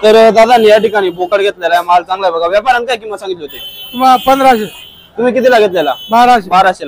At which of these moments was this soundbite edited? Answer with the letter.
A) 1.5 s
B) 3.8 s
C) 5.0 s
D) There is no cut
D